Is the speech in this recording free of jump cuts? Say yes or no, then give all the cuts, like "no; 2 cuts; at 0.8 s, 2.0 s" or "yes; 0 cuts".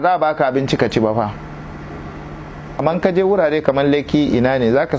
no; 1 cut; at 2.8 s